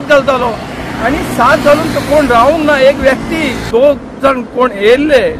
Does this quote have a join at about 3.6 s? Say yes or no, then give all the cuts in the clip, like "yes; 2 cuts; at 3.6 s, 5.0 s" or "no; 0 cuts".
yes; 1 cut; at 3.6 s